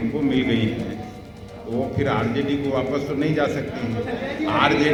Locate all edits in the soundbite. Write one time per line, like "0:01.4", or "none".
none